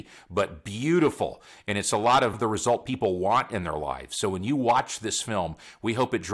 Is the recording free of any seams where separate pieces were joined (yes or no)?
no